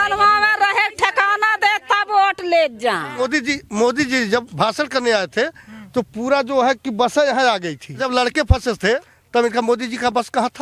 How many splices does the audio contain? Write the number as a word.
three